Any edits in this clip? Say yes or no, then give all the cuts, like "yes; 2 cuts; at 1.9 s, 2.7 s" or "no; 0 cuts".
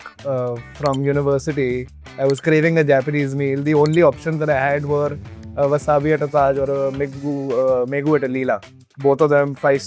yes; 1 cut; at 8.9 s